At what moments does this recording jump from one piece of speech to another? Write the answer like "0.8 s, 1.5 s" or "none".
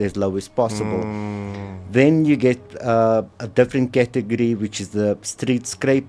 none